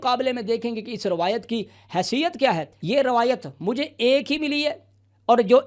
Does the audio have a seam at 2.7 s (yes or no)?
yes